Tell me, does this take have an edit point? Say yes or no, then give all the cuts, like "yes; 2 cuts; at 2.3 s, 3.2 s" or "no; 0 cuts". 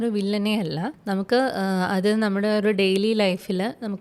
yes; 1 cut; at 0.9 s